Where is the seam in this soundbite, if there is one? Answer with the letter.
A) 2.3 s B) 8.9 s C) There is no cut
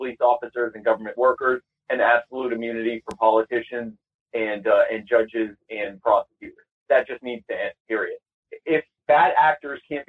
B